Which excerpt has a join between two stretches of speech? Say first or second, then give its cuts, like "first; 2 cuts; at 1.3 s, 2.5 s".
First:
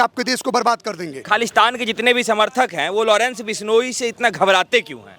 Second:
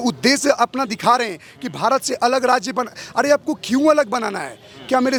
first; 1 cut; at 1.2 s